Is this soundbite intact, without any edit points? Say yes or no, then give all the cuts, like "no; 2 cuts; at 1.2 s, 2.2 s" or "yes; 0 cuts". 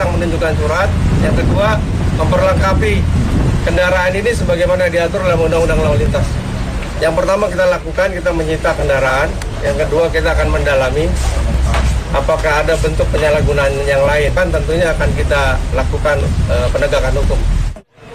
yes; 0 cuts